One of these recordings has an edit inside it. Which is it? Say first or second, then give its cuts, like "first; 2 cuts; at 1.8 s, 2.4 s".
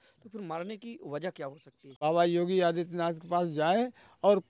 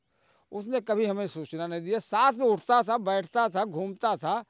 first; 1 cut; at 2.0 s